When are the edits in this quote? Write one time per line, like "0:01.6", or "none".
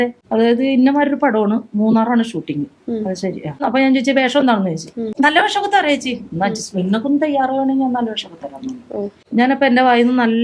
none